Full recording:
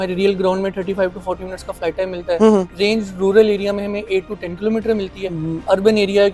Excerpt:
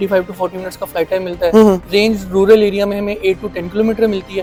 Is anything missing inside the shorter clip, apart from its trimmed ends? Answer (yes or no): no